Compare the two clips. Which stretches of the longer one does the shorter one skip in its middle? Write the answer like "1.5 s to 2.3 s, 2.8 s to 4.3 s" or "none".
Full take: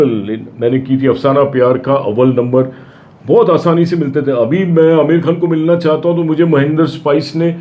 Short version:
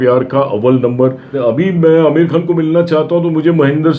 2.8 s to 4.2 s

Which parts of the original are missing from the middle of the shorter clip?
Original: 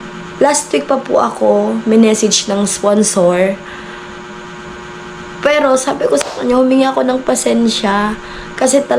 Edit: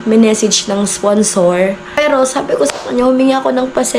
3.8 s to 5.5 s

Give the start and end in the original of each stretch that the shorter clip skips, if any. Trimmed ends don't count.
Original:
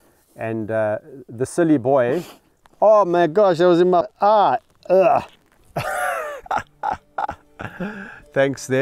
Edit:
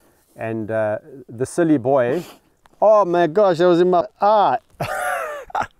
4.7 s to 5.7 s

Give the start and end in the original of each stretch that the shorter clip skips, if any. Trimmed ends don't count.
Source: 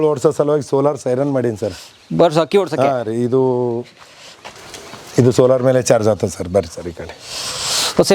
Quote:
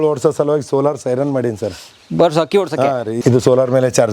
3.2 s to 5.1 s

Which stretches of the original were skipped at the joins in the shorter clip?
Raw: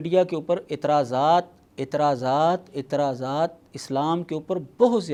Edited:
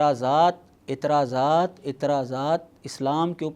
none

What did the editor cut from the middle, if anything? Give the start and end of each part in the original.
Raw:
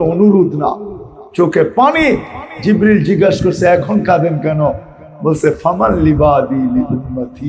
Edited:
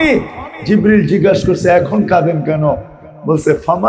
none

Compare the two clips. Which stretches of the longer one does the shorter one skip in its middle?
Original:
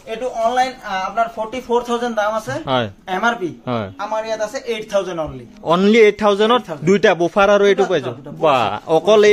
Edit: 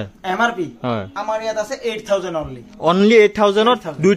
none

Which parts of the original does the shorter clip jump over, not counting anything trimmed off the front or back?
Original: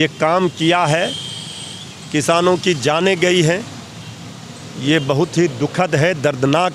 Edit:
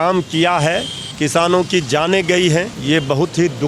1.3 s to 1.9 s, 3.7 s to 4.7 s

